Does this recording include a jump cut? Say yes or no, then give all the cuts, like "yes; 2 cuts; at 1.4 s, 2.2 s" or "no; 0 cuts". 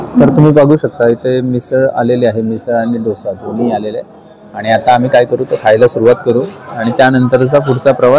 no; 0 cuts